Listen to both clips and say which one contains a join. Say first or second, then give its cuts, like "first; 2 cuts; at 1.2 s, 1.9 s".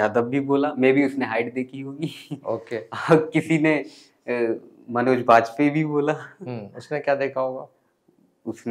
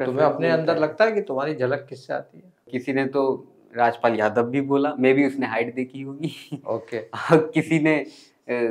second; 1 cut; at 2.7 s